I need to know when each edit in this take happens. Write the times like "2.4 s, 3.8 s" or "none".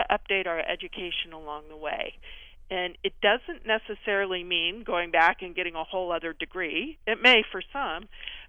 none